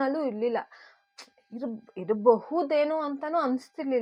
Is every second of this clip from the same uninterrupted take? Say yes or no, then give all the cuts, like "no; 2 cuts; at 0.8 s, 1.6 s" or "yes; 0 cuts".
yes; 0 cuts